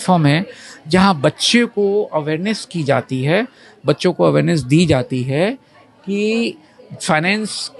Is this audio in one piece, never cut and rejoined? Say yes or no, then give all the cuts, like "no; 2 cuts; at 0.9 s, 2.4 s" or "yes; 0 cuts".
yes; 0 cuts